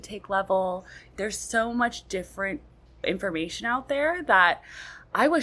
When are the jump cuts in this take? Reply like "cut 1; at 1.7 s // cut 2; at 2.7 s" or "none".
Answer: cut 1; at 1.1 s // cut 2; at 3.0 s